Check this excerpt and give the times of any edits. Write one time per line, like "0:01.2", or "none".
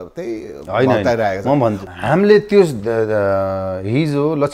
none